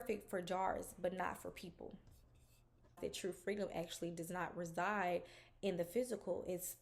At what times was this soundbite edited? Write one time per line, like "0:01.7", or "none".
0:03.0